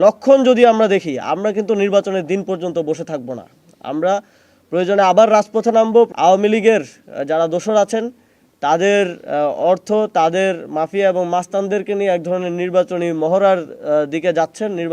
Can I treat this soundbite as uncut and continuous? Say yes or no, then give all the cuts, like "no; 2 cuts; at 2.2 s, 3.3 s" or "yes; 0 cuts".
no; 1 cut; at 6.1 s